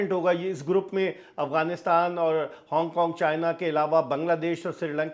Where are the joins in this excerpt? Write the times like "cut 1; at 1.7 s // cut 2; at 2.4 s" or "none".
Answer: none